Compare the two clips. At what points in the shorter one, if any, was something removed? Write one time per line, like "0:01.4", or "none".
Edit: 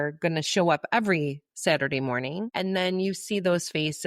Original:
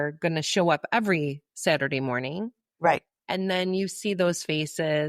0:02.5